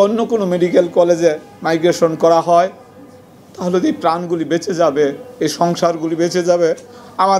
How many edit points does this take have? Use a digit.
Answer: 0